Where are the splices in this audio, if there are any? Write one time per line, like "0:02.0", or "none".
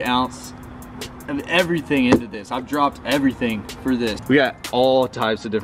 0:04.2